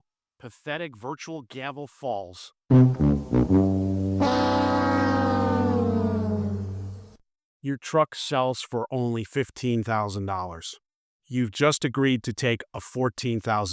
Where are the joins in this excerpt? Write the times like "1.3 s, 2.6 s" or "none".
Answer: none